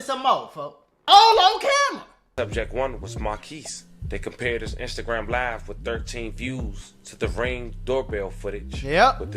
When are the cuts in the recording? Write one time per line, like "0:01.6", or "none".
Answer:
0:00.9
0:02.1